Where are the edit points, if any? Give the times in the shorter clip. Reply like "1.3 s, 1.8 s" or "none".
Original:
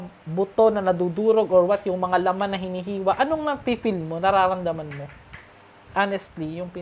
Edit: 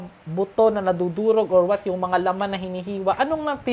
none